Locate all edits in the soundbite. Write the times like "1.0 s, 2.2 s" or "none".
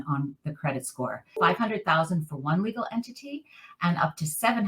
1.4 s